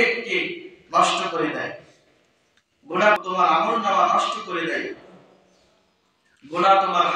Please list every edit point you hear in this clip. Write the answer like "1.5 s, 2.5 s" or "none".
3.2 s